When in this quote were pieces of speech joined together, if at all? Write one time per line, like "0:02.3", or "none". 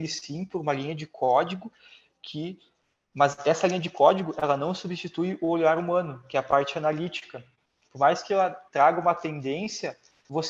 none